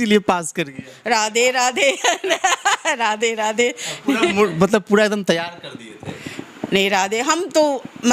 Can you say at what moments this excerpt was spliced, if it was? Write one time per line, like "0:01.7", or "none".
none